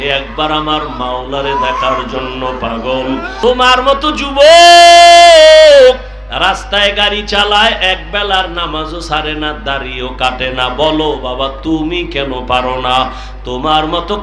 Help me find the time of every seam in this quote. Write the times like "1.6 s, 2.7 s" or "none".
3.3 s